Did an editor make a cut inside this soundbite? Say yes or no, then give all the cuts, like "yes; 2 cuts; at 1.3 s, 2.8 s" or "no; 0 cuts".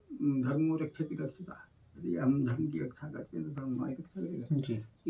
no; 0 cuts